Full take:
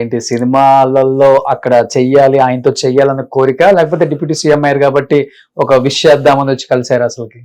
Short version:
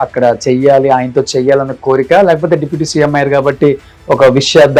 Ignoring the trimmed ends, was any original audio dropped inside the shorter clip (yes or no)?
no